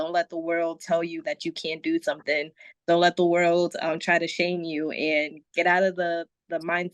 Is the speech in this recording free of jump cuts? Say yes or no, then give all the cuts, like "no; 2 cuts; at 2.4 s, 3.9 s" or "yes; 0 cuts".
yes; 0 cuts